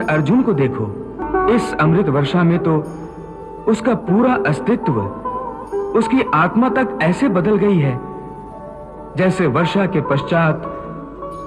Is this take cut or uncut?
cut